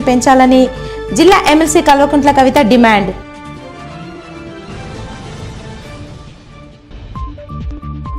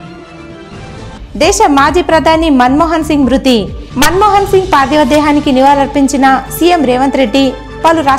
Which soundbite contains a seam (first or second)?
second